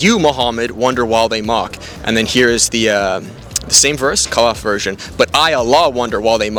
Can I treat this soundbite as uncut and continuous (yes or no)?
yes